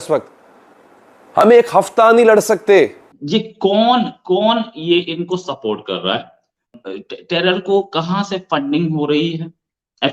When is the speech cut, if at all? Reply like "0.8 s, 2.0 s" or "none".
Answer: 3.1 s, 6.8 s